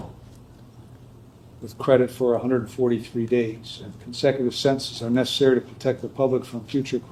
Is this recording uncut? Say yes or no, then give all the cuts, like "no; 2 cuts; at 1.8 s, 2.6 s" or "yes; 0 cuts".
yes; 0 cuts